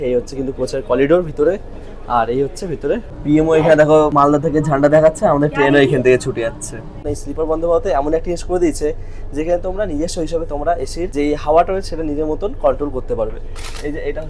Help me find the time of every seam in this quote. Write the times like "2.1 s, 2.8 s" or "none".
3.1 s, 4.1 s, 7.0 s, 11.1 s